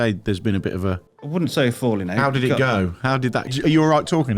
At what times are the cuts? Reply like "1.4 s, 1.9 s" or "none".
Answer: 1.1 s, 3.5 s